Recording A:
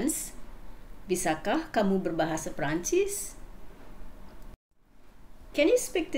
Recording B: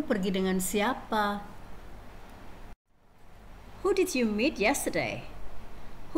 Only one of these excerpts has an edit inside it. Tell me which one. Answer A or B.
B